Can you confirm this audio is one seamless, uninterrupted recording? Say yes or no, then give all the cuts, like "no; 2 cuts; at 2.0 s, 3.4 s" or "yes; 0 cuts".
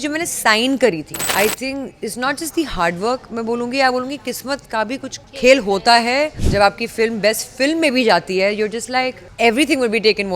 no; 4 cuts; at 1.2 s, 5.2 s, 6.4 s, 9.2 s